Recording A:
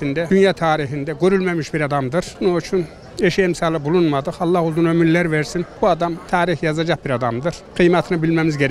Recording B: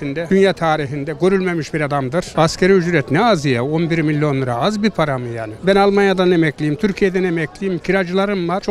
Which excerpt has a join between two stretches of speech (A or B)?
B